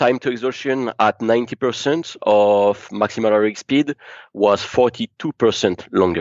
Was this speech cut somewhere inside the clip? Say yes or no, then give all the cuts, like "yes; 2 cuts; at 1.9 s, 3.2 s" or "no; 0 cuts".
no; 0 cuts